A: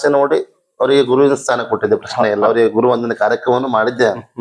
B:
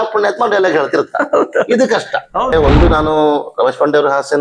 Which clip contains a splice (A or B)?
B